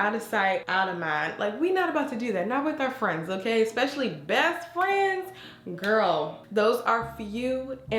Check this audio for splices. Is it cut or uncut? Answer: uncut